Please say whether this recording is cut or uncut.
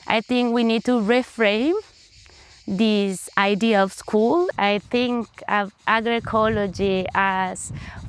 cut